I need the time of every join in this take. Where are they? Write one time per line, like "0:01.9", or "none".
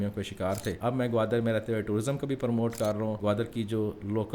0:00.8
0:03.2